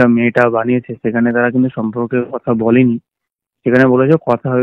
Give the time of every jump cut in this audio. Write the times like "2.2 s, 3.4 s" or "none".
none